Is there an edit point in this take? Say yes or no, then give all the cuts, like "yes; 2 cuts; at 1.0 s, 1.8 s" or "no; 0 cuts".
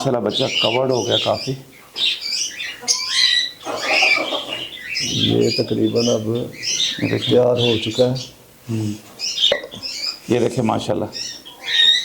yes; 1 cut; at 9.5 s